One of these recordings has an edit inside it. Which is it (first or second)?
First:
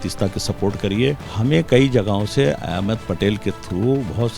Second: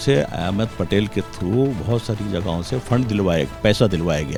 first